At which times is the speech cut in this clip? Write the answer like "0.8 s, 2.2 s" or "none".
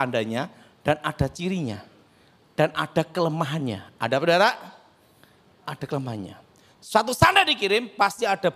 none